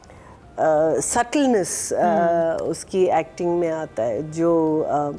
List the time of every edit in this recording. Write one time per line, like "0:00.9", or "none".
none

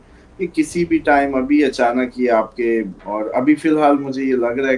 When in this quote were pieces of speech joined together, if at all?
0:03.0

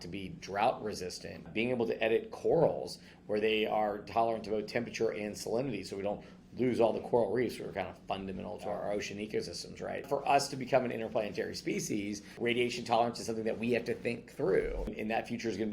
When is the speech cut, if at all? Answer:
0:01.5
0:08.7
0:10.1
0:12.4
0:14.9

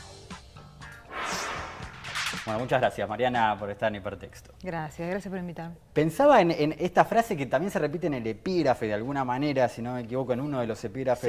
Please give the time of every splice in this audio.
0:00.9

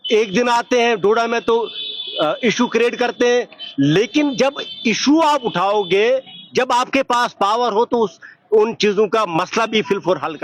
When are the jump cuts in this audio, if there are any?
0:05.9

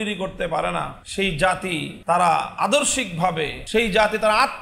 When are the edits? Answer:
0:01.0
0:01.9
0:03.6

